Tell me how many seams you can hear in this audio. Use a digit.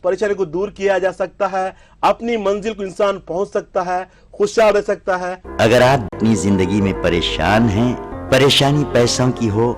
2